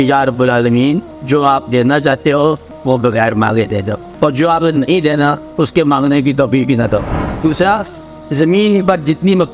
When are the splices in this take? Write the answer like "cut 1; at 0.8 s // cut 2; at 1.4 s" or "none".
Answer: cut 1; at 1.1 s // cut 2; at 2.7 s // cut 3; at 4.0 s // cut 4; at 7.2 s